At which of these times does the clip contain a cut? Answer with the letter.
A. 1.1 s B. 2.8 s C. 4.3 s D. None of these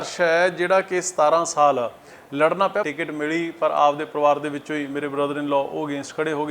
B